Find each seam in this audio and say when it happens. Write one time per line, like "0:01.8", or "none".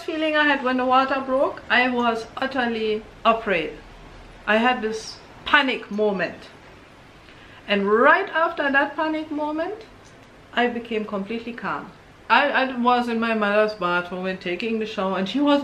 0:12.2